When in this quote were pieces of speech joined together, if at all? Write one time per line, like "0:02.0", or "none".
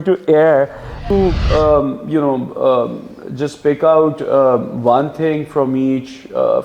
0:01.0